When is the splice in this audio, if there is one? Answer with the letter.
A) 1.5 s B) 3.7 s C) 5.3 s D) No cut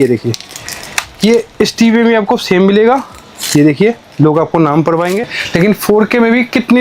C